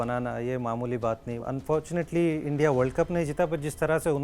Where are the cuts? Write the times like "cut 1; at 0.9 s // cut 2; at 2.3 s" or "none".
cut 1; at 1.4 s